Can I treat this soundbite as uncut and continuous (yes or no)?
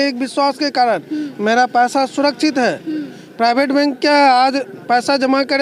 yes